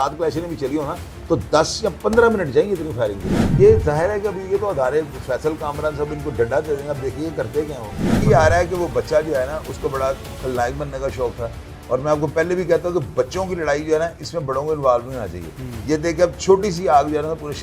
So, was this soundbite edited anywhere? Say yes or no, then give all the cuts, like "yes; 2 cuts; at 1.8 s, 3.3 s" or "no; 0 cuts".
yes; 2 cuts; at 3.4 s, 8.2 s